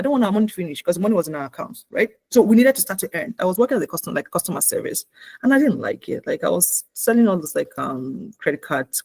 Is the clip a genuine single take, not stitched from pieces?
no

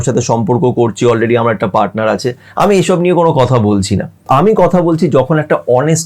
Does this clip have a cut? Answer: yes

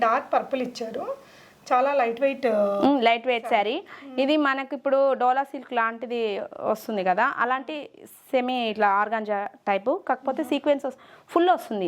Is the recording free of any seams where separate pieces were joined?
yes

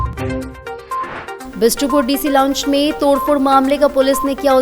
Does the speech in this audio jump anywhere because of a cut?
yes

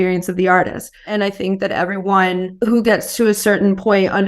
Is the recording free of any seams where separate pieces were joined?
no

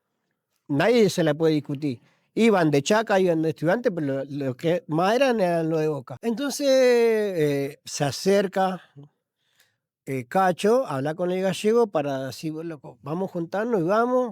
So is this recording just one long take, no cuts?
no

